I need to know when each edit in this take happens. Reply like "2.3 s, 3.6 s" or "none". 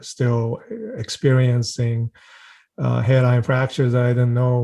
none